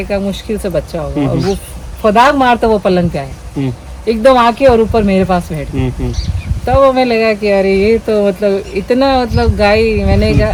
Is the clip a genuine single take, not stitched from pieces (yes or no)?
yes